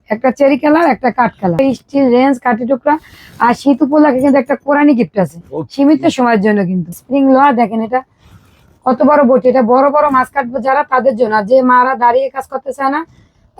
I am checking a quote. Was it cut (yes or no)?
yes